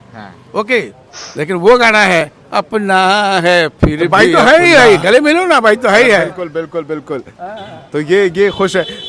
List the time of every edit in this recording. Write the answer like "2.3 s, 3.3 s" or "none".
4.0 s